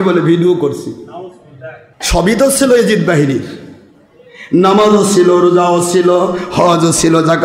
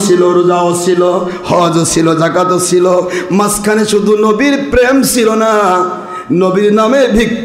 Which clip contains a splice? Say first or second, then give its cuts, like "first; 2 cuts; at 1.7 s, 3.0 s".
first; 1 cut; at 2.0 s